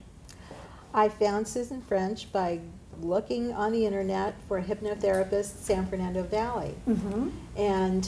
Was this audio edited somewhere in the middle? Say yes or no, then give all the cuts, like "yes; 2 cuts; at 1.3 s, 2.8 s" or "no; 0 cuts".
no; 0 cuts